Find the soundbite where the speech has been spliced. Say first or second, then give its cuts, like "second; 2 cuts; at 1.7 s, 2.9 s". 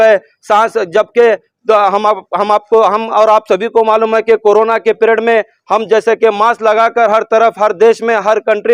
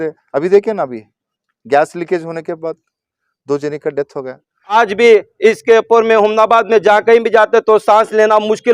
second; 1 cut; at 4.7 s